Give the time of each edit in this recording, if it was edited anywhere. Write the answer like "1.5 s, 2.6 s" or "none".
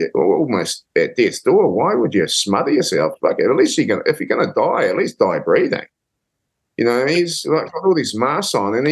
none